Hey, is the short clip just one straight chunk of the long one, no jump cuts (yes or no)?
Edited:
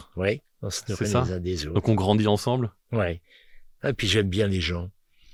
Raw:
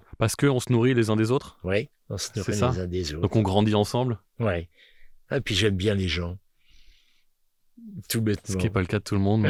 yes